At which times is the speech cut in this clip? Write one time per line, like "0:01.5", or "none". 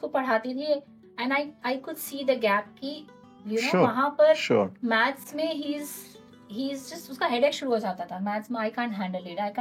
none